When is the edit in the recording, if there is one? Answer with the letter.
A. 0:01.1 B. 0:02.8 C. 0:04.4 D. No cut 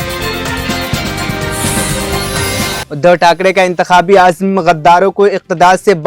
B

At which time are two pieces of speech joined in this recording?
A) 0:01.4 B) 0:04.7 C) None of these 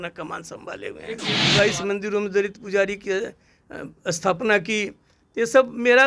A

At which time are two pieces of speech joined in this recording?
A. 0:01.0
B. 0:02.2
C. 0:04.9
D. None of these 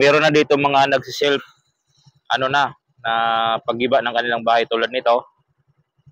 D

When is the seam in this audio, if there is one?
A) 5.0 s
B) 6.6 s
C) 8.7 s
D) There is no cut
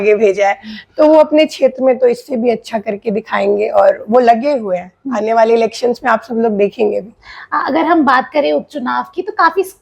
D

